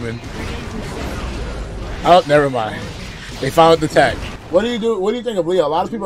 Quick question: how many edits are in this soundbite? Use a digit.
1